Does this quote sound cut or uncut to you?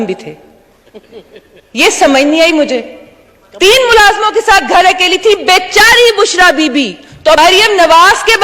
cut